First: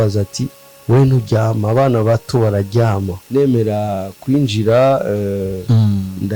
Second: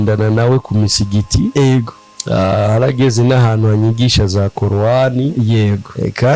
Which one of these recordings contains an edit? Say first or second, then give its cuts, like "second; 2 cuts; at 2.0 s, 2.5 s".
first; 1 cut; at 3.1 s